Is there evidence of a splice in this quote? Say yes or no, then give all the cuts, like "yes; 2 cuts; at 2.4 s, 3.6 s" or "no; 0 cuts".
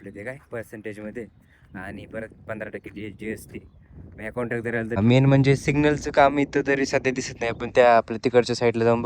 yes; 1 cut; at 5.0 s